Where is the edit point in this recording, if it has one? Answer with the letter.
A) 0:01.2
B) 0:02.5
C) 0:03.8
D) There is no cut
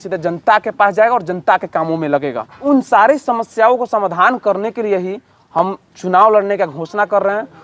B